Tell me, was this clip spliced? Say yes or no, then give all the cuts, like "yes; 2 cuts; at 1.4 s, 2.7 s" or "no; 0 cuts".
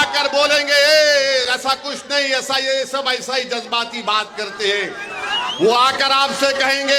no; 0 cuts